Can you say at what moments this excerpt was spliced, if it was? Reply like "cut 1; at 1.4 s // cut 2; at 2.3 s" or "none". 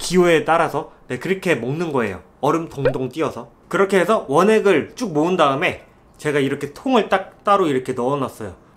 cut 1; at 3.5 s